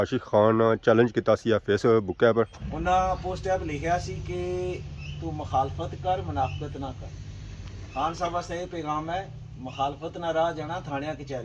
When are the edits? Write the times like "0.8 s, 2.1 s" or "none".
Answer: 2.6 s